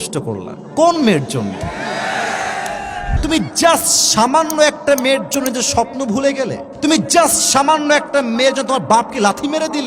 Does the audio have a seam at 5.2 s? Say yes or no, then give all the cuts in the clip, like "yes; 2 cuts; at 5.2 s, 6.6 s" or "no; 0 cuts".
no; 2 cuts; at 3.1 s, 6.6 s